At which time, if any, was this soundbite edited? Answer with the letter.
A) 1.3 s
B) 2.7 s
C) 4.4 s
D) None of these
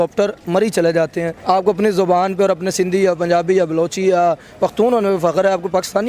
A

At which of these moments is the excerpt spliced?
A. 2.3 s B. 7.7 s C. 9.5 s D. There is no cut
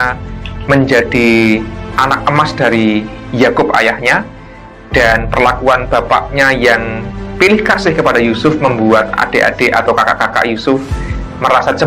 D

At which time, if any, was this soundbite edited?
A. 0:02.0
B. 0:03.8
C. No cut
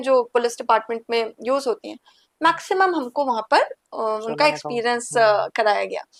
C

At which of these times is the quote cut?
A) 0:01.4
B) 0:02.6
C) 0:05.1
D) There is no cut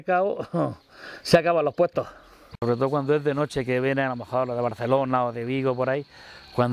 B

